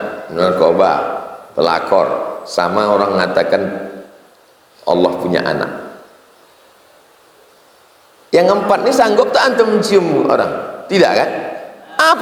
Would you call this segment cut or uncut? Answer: uncut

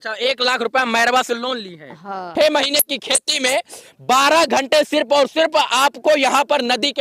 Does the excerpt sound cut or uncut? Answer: cut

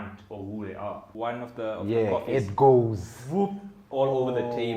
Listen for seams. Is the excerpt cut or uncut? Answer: cut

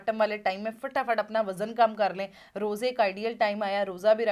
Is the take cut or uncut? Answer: uncut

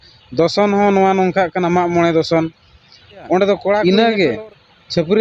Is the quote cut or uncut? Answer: cut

